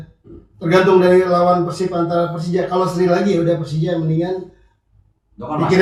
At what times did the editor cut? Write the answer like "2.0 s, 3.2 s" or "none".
none

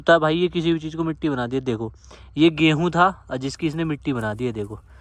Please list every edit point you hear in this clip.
none

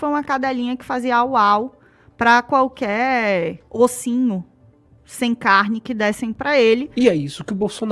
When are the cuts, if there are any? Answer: 6.9 s

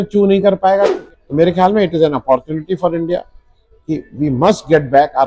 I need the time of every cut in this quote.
1.0 s

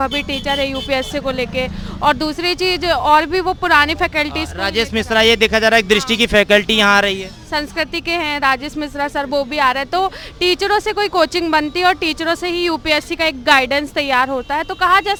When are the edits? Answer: none

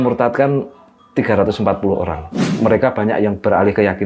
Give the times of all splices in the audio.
2.5 s

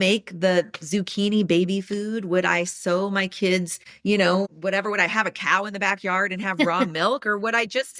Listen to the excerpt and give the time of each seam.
none

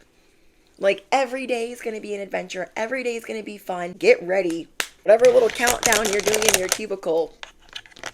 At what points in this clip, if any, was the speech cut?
3.9 s, 5.1 s

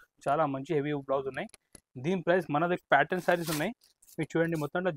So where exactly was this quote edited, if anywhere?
2.8 s

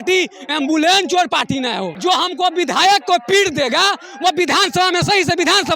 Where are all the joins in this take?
1.9 s

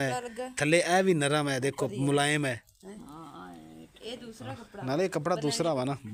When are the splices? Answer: none

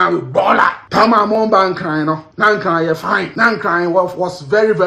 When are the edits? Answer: 0.8 s, 2.3 s, 3.3 s

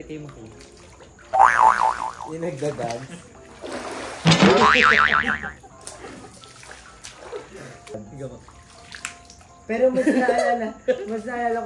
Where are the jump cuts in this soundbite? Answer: 7.9 s

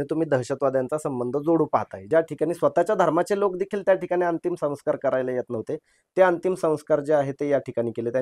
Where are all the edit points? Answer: 2.1 s

